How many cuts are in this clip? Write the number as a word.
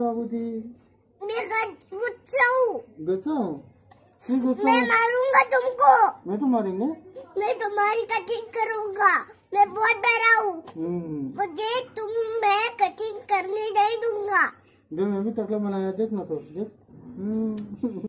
zero